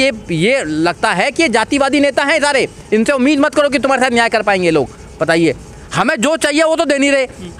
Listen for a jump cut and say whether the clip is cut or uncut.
uncut